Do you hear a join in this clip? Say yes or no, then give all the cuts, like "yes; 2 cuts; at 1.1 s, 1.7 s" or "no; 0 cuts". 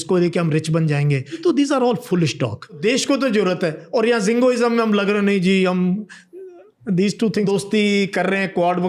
yes; 3 cuts; at 1.3 s, 2.8 s, 7.5 s